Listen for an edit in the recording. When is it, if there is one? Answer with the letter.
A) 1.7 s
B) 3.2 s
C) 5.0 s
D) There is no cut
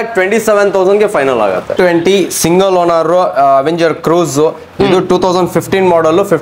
A